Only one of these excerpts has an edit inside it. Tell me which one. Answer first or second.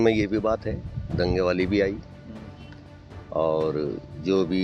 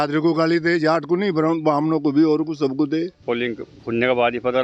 second